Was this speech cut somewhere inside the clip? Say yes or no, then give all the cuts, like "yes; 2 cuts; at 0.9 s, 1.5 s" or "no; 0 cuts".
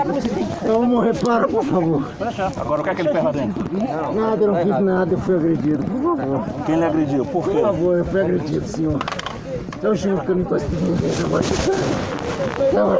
no; 0 cuts